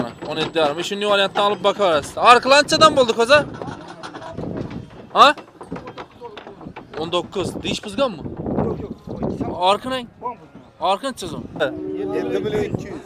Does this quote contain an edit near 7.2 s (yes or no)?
no